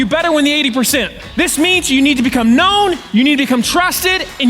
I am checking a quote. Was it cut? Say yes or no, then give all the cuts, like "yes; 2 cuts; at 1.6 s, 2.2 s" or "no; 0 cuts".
yes; 2 cuts; at 1.2 s, 3.0 s